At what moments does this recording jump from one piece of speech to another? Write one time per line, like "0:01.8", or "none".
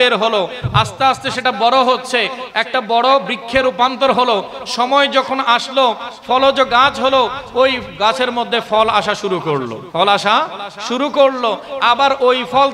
0:09.8